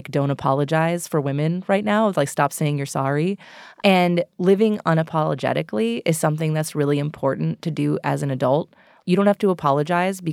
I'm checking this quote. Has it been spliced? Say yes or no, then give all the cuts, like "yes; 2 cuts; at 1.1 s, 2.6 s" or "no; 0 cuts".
no; 0 cuts